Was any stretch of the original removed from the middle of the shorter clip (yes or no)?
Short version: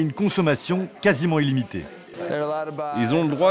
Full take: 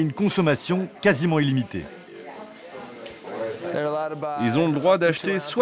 yes